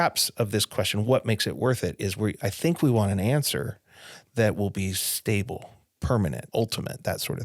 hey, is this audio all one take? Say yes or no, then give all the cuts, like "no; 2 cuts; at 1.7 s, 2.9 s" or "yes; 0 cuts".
no; 1 cut; at 6.4 s